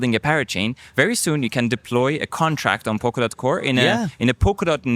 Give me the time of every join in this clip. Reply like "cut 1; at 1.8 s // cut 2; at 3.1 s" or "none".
none